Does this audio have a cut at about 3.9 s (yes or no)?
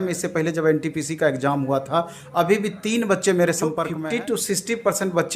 yes